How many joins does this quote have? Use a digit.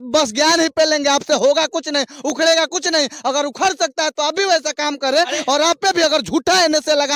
0